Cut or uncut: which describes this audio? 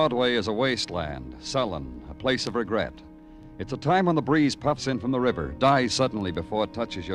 uncut